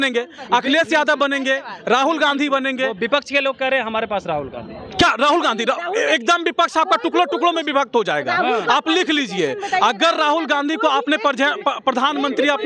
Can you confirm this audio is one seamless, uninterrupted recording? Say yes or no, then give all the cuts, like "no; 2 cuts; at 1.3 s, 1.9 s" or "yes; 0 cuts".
yes; 0 cuts